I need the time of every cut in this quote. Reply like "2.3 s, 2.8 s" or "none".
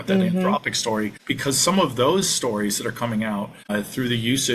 1.2 s, 3.6 s